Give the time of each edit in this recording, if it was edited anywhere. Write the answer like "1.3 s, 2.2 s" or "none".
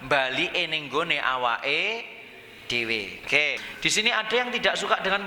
3.7 s